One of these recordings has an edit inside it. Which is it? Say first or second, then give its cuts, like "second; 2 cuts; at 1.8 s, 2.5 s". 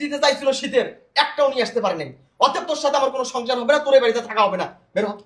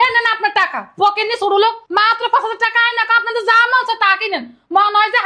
second; 1 cut; at 1.8 s